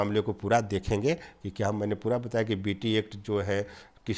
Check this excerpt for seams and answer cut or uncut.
uncut